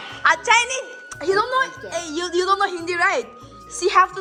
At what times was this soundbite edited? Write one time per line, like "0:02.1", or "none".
none